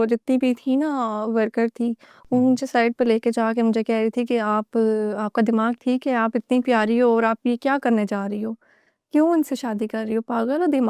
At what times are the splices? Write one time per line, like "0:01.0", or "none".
none